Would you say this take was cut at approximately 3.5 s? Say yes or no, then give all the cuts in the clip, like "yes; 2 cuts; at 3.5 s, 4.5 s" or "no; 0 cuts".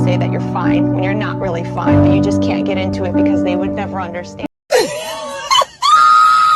no; 0 cuts